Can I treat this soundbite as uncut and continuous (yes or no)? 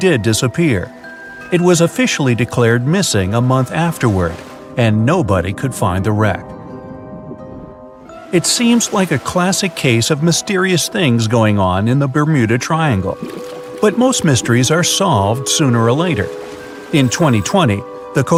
yes